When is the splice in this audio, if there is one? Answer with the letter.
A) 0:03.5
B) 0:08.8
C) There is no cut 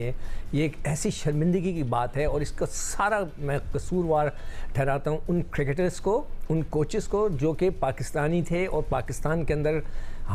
C